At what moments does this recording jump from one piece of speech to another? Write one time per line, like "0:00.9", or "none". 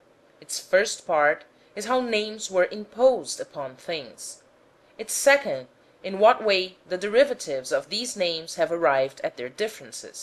0:06.5